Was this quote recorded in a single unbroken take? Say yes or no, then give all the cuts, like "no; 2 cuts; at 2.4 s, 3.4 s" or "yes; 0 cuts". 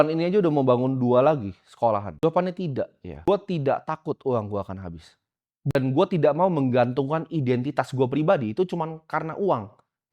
no; 3 cuts; at 2.1 s, 3.1 s, 5.8 s